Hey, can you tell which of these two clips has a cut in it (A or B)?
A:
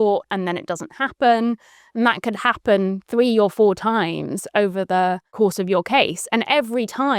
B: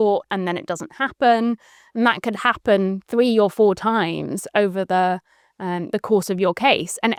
A